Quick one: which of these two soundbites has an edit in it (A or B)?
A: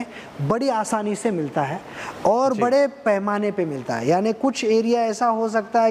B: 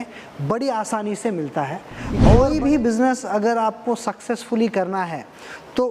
B